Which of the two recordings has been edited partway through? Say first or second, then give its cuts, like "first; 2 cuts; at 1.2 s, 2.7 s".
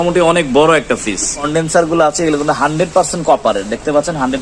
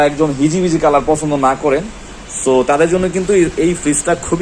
first; 1 cut; at 1.5 s